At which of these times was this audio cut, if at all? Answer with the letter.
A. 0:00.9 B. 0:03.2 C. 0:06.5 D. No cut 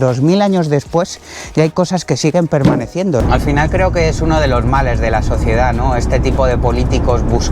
B